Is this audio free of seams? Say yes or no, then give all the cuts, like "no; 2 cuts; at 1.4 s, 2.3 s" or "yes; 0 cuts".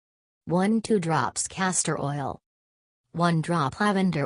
no; 1 cut; at 1.4 s